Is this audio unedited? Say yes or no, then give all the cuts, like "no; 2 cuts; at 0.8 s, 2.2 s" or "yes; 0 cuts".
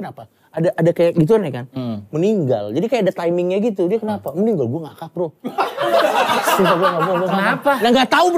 yes; 0 cuts